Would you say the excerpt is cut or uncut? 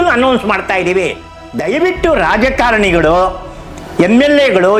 cut